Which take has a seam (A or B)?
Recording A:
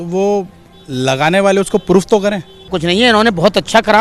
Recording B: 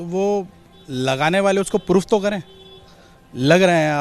A